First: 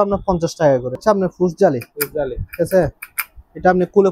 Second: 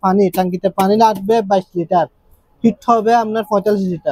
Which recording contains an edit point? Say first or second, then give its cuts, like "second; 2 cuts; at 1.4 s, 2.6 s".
first; 1 cut; at 1.0 s